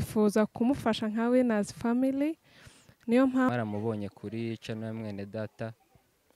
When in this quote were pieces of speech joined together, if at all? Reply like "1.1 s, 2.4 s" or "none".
3.5 s